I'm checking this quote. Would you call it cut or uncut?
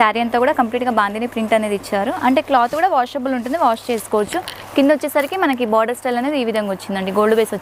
uncut